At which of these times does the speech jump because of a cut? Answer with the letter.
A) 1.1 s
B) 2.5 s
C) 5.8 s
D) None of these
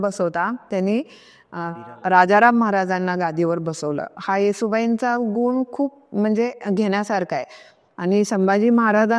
D